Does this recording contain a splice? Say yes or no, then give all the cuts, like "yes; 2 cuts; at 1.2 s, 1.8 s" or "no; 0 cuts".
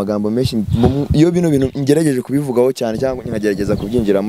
no; 0 cuts